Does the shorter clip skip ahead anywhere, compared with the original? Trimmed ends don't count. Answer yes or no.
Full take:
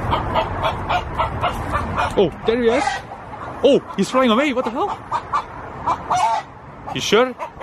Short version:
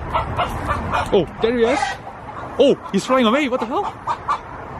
no